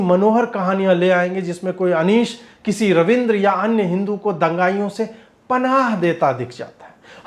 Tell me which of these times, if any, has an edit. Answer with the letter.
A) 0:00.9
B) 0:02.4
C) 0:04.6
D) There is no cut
D